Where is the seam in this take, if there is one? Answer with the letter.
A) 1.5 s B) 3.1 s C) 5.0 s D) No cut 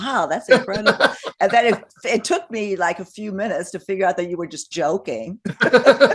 D